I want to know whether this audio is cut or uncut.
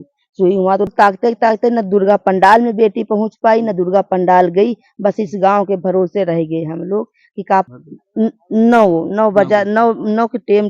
cut